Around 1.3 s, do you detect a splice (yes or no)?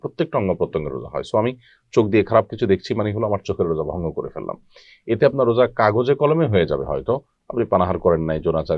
no